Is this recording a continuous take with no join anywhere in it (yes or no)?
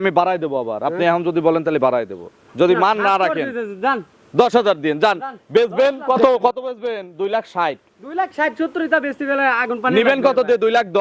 yes